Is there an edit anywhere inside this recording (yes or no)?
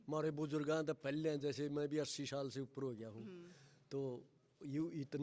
no